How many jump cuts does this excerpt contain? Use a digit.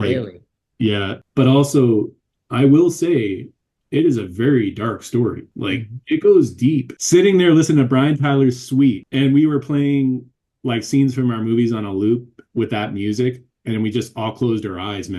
4